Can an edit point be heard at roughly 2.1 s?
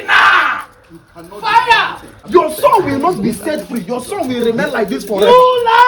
yes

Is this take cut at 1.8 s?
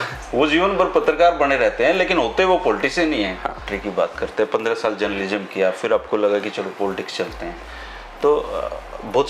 no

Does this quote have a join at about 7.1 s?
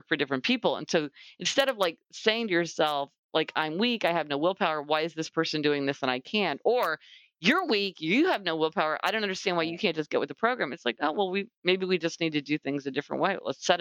no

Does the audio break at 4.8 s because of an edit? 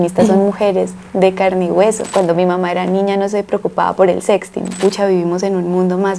yes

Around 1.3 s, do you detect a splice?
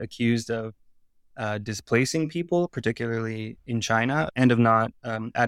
no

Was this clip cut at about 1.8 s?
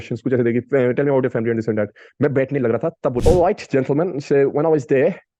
no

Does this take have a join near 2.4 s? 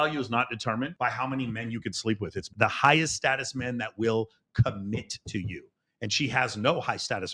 yes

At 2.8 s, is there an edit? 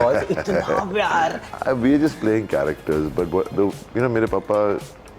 no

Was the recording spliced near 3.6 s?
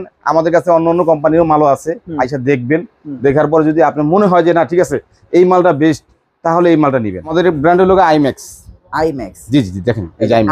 no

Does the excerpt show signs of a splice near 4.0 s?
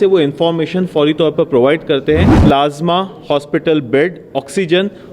no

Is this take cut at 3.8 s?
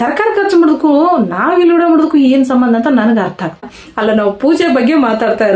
yes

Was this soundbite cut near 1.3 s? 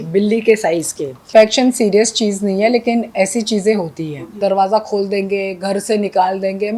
yes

